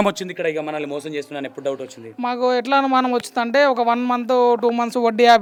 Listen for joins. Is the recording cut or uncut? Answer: uncut